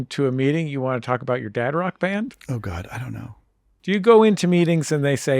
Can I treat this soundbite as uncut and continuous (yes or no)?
no